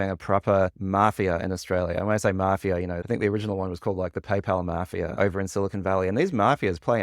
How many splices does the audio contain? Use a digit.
1